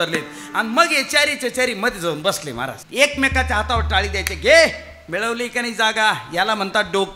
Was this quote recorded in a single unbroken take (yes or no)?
no